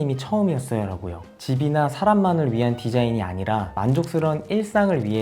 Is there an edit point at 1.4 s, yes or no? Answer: yes